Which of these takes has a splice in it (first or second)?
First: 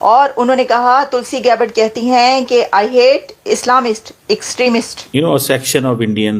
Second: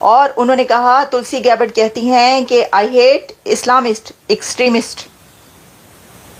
first